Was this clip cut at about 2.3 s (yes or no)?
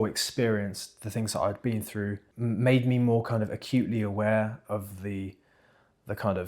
yes